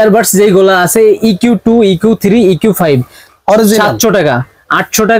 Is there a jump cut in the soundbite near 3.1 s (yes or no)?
no